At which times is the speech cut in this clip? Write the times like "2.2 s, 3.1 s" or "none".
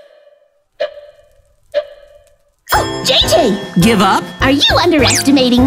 3.1 s